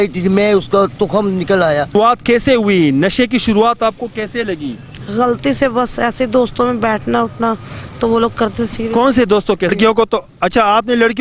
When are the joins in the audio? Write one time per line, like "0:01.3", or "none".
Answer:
0:01.9
0:09.7